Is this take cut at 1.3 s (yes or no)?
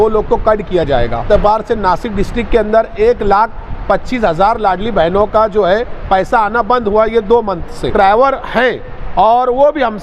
yes